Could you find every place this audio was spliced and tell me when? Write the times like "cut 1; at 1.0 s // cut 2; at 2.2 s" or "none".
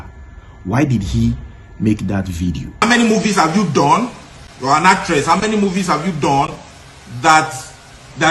cut 1; at 2.8 s